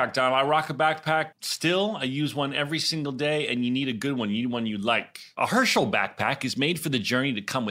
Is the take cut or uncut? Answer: cut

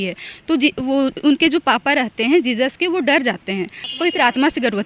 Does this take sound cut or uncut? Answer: cut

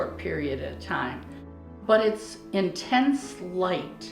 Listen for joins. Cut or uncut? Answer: cut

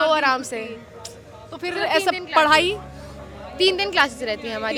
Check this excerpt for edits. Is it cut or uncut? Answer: uncut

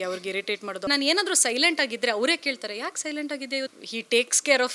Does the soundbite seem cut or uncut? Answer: cut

